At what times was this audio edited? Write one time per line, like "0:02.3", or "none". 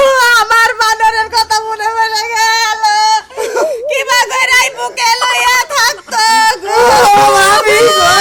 none